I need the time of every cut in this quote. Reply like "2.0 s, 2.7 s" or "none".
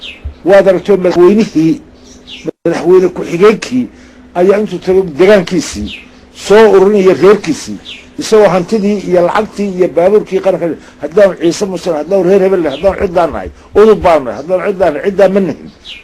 1.1 s

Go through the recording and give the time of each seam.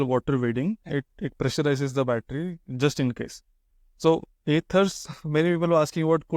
5.0 s

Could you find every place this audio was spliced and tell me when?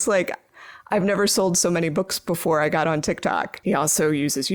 3.5 s

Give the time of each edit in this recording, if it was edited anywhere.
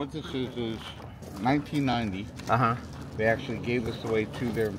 none

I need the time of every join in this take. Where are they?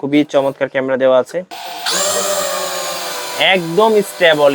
1.4 s

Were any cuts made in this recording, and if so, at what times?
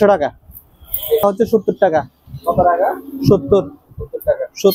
1.2 s

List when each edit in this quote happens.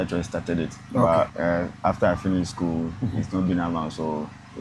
1.3 s

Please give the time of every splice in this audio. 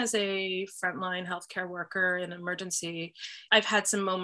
3.3 s

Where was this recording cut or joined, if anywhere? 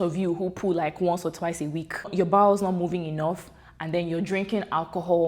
2.1 s

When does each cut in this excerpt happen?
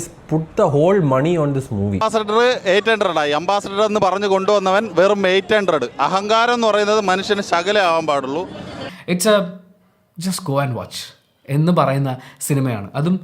2.0 s, 8.8 s

